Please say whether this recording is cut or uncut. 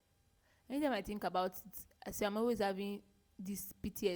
uncut